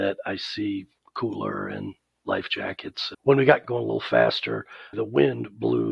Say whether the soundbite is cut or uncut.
cut